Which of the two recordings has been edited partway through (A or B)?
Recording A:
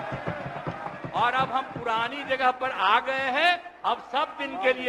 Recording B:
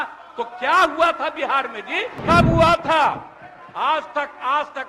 B